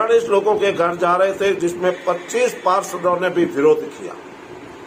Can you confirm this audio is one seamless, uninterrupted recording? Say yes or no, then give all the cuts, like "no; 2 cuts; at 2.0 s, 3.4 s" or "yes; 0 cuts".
yes; 0 cuts